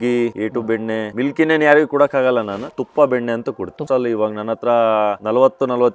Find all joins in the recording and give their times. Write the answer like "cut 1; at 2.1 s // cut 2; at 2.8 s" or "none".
cut 1; at 2.8 s // cut 2; at 3.8 s